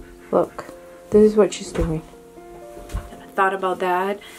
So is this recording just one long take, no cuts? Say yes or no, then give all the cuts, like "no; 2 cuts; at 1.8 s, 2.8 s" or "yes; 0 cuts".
no; 1 cut; at 3.3 s